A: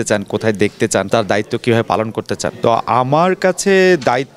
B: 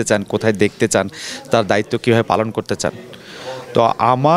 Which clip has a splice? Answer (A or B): A